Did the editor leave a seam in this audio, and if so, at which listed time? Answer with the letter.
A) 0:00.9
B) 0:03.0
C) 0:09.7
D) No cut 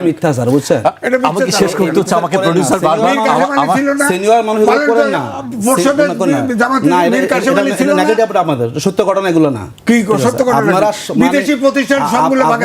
C